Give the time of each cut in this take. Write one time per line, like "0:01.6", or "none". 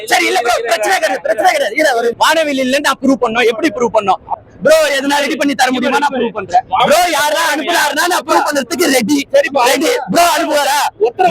0:02.1
0:04.3
0:06.8

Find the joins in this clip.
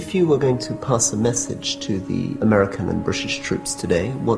0:02.3

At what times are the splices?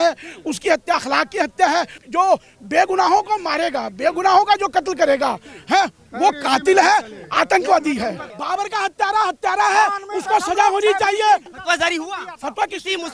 0:02.0
0:08.3
0:11.5

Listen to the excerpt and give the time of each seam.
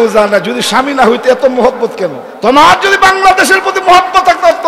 0:02.3

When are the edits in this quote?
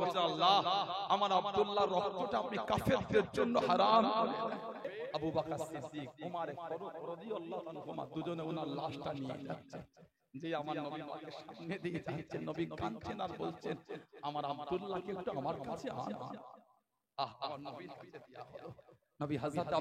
0:04.9

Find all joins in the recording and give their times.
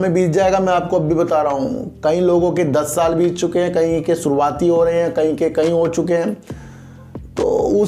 none

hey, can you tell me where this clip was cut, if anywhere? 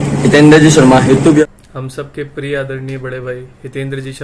0:01.4

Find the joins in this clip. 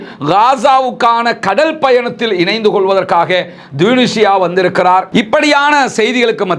0:05.1

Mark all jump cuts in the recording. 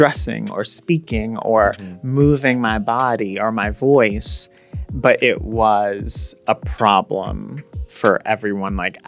none

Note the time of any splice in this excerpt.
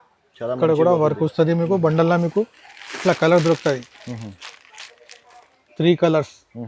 none

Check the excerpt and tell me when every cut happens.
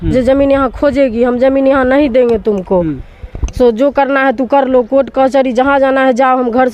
none

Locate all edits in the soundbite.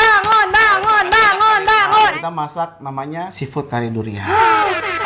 0:02.2

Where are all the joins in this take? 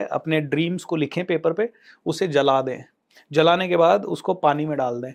none

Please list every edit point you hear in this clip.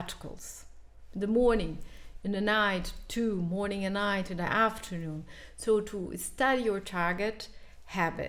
none

